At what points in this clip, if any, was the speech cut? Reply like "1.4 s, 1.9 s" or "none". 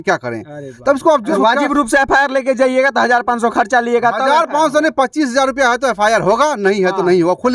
1.3 s